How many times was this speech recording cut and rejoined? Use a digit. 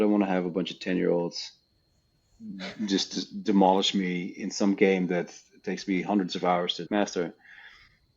1